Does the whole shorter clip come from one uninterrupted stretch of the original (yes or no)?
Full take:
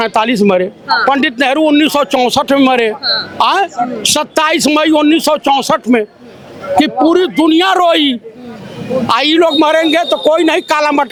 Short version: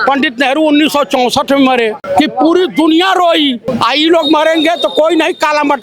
no